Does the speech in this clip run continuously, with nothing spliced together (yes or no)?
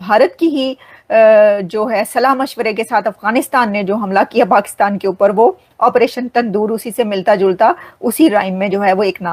yes